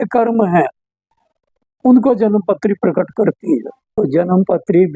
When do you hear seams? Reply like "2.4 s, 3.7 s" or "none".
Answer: 3.8 s